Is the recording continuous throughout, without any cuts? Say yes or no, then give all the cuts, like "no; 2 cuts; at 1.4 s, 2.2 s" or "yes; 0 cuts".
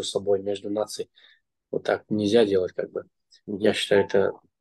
yes; 0 cuts